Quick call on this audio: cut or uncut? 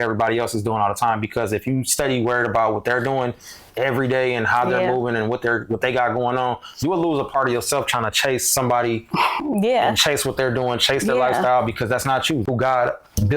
cut